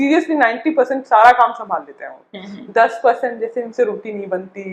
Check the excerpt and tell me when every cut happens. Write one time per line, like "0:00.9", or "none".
none